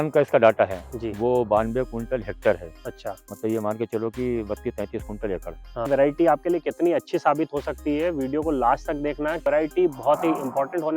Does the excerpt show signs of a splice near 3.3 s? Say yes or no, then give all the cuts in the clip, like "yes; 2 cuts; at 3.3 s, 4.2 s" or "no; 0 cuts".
no; 2 cuts; at 5.9 s, 9.4 s